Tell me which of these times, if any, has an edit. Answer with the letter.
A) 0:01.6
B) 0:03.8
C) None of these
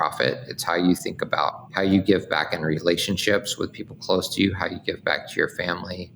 A